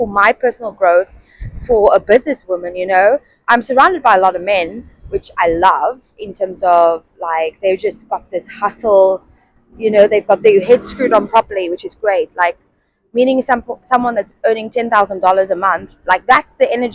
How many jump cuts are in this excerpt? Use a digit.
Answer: 0